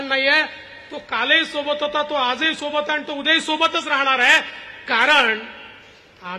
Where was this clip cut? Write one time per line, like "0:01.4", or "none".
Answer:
none